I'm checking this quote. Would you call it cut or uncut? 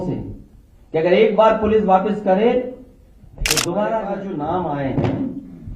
cut